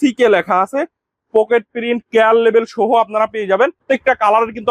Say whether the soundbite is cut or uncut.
cut